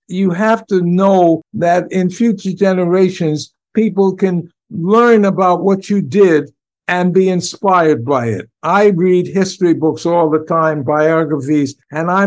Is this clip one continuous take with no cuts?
no; 1 cut; at 1.5 s

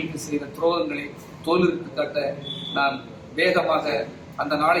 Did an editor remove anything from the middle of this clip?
no; 0 cuts

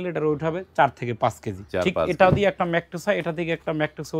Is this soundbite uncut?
no; 1 cut; at 1.5 s

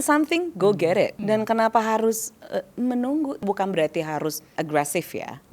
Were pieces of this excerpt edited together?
yes; 3 cuts; at 1.2 s, 3.4 s, 4.5 s

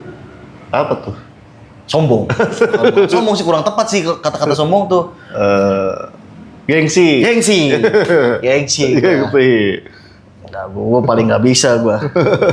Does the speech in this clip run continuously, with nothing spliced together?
yes; 0 cuts

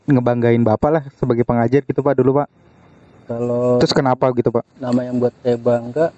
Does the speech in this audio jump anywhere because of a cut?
no; 0 cuts

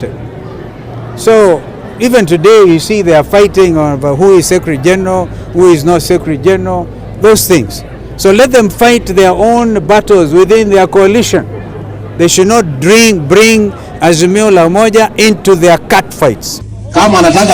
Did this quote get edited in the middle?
yes; 1 cut; at 16.5 s

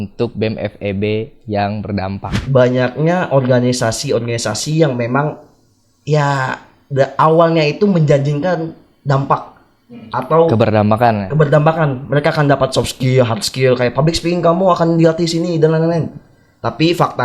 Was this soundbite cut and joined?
yes; 1 cut; at 2.4 s

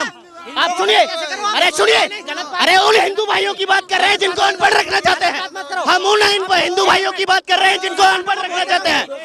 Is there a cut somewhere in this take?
no; 0 cuts

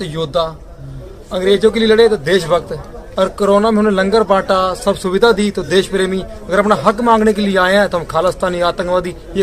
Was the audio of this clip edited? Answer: no; 0 cuts

